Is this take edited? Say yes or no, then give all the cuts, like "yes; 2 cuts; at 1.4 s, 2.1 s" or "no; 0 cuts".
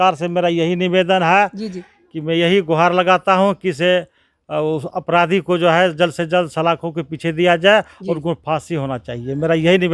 no; 0 cuts